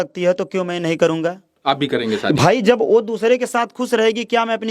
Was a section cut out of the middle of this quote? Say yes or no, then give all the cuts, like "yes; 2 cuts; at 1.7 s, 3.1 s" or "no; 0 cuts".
yes; 1 cut; at 1.5 s